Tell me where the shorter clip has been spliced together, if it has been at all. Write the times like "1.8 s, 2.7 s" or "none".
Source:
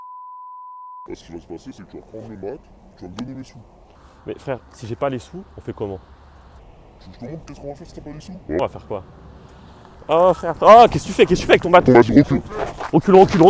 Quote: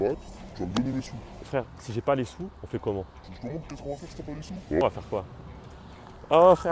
1.5 s, 3.2 s